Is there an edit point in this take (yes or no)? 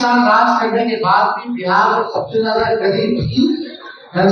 no